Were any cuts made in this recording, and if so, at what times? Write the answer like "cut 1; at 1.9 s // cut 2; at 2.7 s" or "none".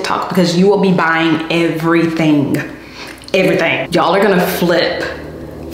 cut 1; at 3.9 s